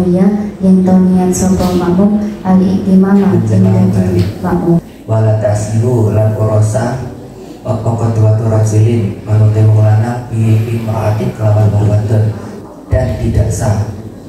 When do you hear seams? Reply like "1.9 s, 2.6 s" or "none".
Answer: 4.9 s, 12.5 s